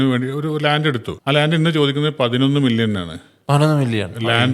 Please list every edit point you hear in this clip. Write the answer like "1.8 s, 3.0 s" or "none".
1.1 s